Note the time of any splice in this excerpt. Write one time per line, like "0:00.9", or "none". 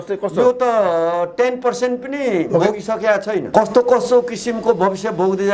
0:03.5